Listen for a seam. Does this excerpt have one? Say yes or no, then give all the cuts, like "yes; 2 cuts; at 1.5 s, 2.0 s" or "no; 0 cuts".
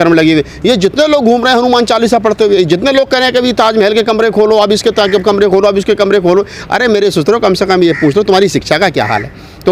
no; 0 cuts